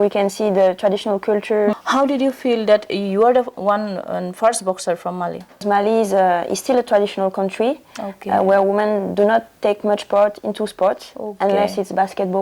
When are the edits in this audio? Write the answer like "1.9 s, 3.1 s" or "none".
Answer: 1.8 s, 5.6 s